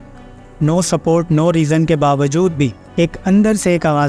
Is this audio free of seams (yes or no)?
no